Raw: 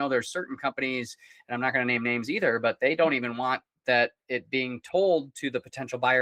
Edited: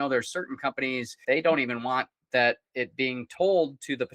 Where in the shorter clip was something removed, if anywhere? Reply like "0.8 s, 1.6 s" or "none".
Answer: 1.2 s